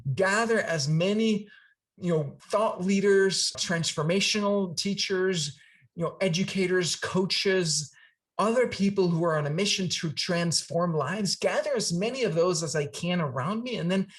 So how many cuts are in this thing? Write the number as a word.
two